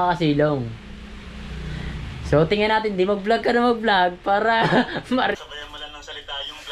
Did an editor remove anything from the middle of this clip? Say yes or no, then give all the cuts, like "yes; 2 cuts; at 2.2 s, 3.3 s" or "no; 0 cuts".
yes; 1 cut; at 5.4 s